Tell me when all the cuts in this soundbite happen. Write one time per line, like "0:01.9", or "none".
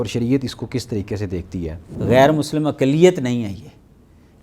0:01.9